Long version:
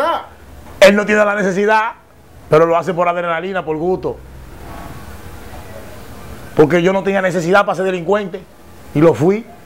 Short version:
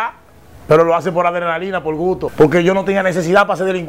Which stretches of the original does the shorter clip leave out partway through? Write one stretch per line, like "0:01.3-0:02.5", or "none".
0:04.1-0:06.5

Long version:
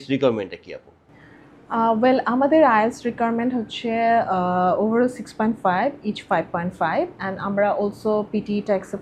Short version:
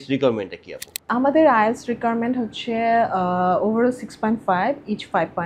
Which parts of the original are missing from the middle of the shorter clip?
0:01.1-0:02.3

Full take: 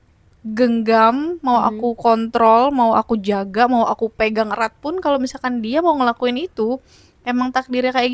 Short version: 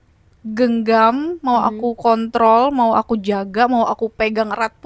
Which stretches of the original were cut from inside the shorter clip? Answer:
none

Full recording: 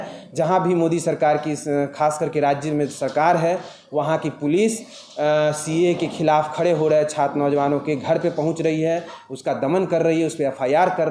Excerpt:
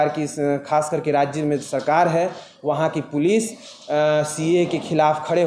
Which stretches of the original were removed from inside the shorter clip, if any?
none

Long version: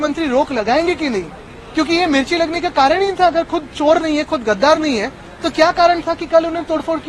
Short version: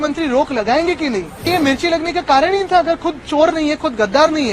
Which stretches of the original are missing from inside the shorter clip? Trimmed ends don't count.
0:01.4-0:01.9

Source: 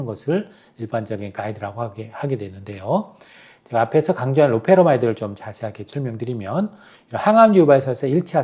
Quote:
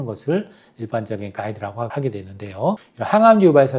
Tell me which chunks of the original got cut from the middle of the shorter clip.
0:01.9-0:02.2
0:03.1-0:07.0

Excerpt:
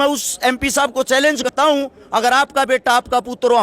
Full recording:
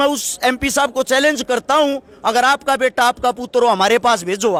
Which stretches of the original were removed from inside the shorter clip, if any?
0:01.5-0:01.6

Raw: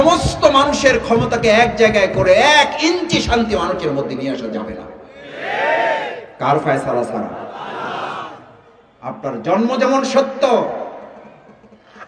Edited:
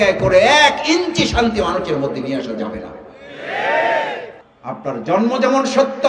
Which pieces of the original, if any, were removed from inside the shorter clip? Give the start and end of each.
0:06.2-0:08.7

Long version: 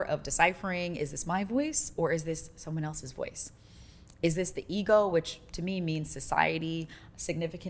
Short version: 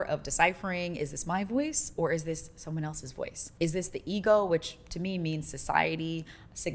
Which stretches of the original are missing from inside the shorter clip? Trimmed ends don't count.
0:03.4-0:04.1

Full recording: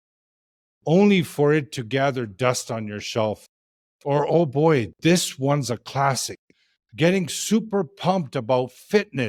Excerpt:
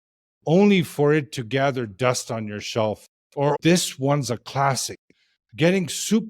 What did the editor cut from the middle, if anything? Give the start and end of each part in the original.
0:03.9-0:04.9

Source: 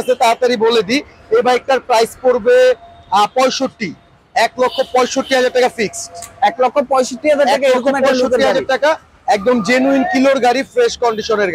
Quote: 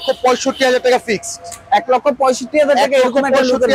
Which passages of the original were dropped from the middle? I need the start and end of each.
none

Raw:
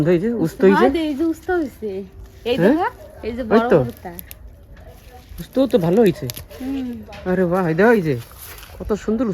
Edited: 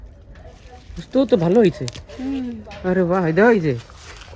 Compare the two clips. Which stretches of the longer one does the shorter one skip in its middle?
none

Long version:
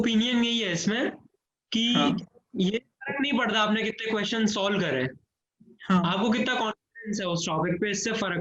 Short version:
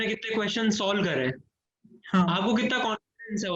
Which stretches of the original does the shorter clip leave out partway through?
none

